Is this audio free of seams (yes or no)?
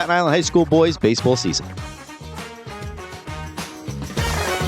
no